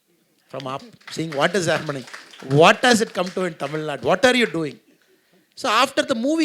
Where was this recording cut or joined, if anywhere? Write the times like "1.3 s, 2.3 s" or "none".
none